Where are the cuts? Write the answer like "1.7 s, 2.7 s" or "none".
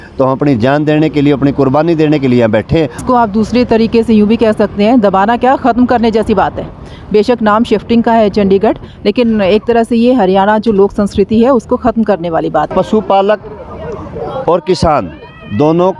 3.0 s, 12.7 s